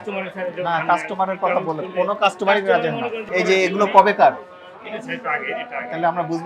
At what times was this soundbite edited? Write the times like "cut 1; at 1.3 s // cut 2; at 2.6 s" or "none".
cut 1; at 3.2 s

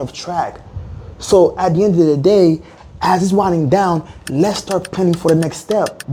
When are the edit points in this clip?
none

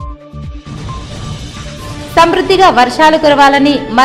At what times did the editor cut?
cut 1; at 1.3 s

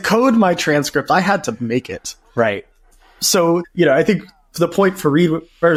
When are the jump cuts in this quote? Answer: none

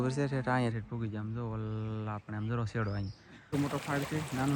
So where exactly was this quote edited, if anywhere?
cut 1; at 3.5 s

